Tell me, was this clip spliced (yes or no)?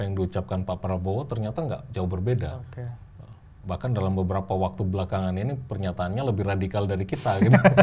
no